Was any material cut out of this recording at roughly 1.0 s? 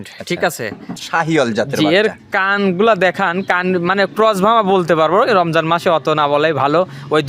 yes; 1 cut; at 1.0 s

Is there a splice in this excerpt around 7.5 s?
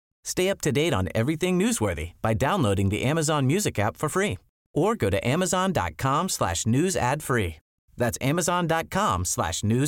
no; 0 cuts

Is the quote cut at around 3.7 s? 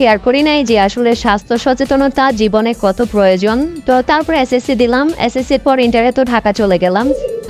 no; 0 cuts

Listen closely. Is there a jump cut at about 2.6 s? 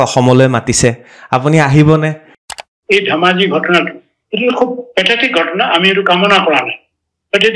yes; 1 cut; at 2.6 s

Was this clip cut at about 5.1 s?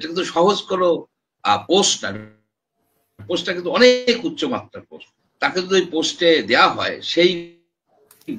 no; 0 cuts

